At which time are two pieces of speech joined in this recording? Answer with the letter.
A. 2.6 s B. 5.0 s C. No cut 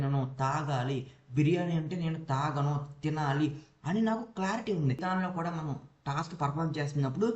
B